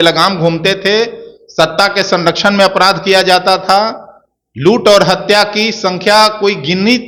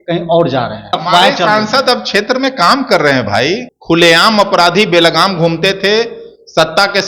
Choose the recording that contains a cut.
second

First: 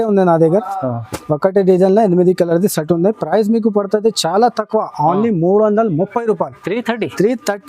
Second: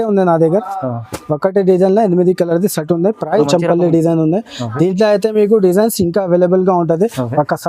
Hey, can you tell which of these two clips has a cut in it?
second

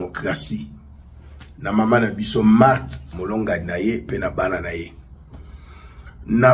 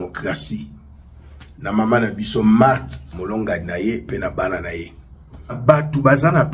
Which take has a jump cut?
second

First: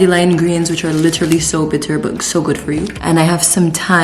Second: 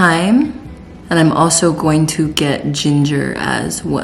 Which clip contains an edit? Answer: first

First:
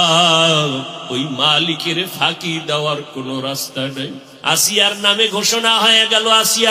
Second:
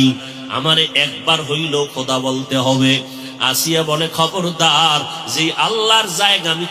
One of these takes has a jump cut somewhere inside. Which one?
first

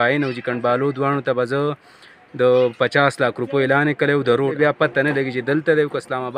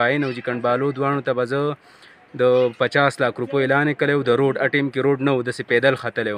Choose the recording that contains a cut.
first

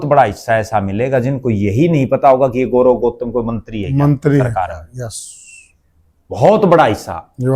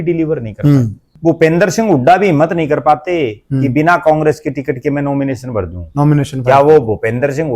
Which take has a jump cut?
second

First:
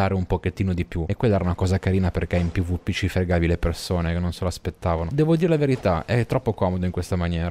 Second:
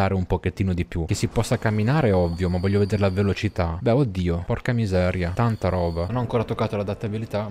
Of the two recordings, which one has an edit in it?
second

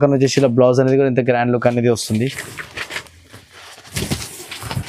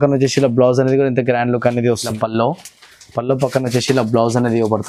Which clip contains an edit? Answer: second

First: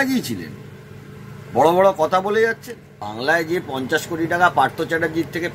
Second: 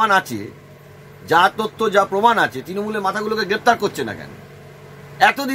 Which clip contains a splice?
first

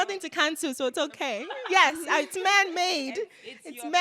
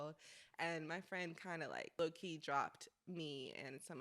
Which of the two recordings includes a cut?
second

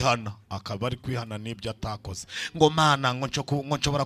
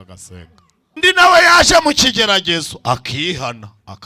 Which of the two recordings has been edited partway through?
second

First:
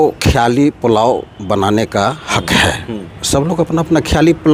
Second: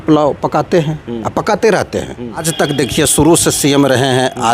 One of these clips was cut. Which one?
second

